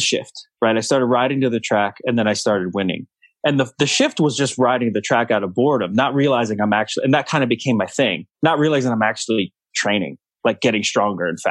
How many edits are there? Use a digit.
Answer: 2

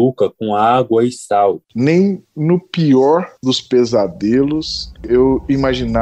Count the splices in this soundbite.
1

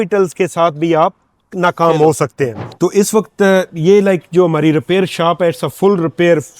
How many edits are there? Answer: 1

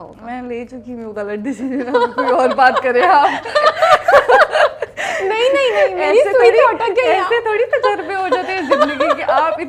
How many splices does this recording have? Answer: 0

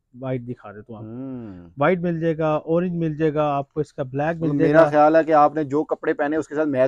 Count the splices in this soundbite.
0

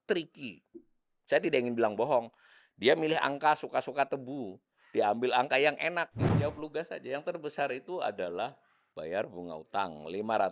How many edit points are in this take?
1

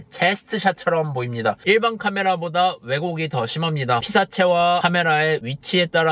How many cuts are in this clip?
1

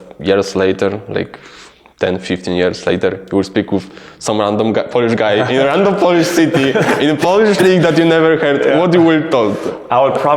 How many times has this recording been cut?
0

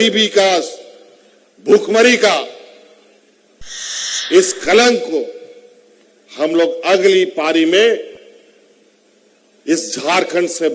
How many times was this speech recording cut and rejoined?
1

